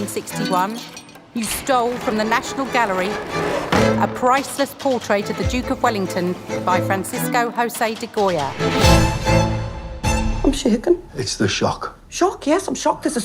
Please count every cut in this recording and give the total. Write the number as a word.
one